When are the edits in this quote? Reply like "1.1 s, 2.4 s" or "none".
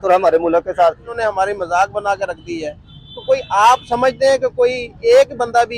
1.1 s